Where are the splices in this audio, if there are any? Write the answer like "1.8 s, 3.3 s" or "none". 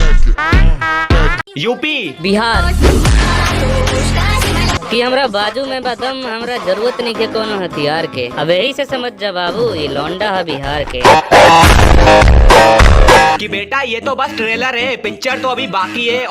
1.4 s